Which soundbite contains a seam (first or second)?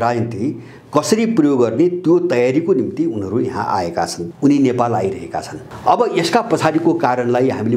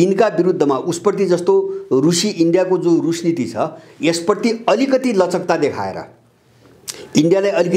first